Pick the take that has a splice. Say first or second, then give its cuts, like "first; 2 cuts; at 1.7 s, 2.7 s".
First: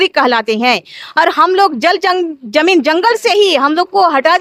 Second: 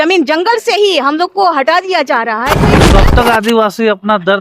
second; 1 cut; at 2.8 s